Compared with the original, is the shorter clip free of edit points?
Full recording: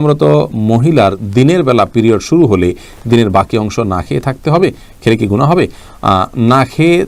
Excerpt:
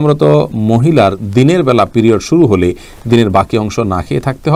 yes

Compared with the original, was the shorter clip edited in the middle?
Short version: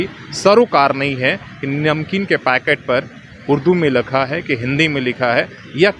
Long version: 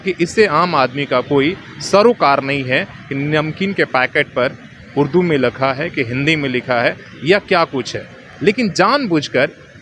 no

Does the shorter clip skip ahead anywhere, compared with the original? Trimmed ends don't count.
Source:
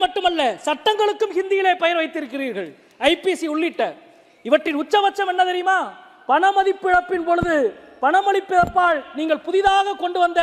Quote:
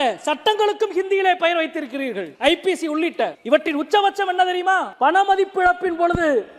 yes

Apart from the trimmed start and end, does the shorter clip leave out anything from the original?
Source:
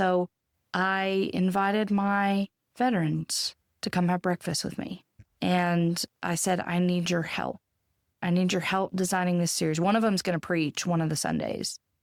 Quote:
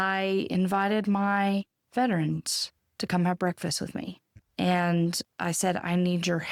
no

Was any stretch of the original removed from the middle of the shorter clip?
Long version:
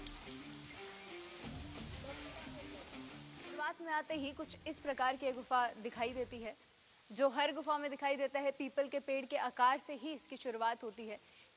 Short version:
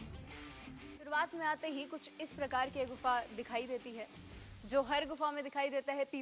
yes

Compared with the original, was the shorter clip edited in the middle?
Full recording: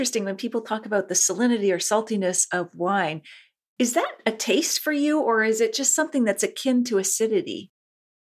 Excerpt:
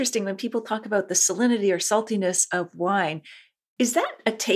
no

